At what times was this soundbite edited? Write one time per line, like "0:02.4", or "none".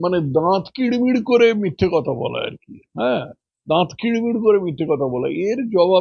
none